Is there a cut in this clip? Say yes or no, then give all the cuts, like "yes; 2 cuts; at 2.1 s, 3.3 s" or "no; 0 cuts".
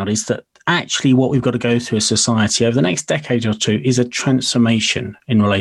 no; 0 cuts